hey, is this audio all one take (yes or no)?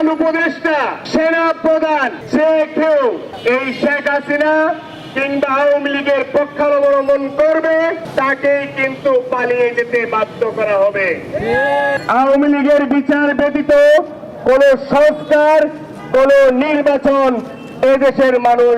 no